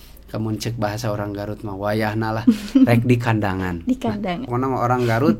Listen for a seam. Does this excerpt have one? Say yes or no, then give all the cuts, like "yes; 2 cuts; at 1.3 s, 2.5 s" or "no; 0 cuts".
yes; 1 cut; at 4.5 s